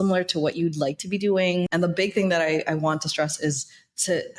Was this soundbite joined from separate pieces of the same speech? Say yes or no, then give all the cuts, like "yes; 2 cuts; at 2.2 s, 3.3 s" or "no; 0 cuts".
yes; 1 cut; at 1.7 s